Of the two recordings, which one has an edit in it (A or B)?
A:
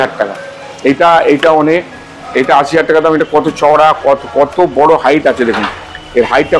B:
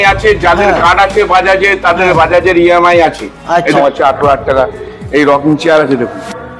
B